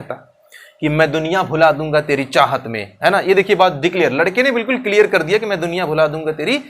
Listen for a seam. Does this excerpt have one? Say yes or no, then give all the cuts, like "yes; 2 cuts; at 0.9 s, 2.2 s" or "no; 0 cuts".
no; 0 cuts